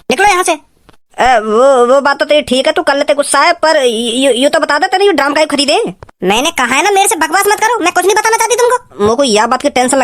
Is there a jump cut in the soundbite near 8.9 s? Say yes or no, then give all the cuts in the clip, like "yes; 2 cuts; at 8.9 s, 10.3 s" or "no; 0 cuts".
yes; 1 cut; at 8.9 s